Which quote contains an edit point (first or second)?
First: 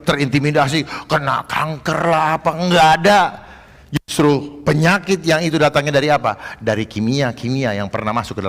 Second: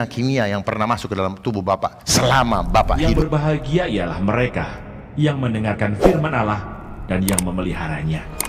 second